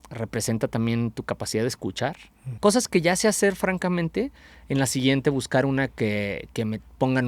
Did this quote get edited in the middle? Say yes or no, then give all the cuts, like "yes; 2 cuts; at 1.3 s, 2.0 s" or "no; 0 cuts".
yes; 1 cut; at 2.5 s